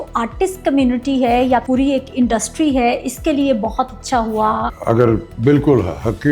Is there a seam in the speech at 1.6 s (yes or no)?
yes